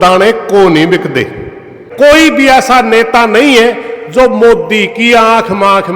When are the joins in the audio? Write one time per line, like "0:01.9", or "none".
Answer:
0:01.8